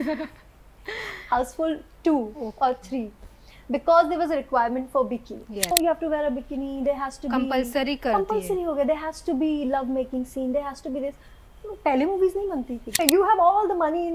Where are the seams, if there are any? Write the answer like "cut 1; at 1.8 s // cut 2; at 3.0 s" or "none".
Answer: cut 1; at 5.7 s // cut 2; at 13.0 s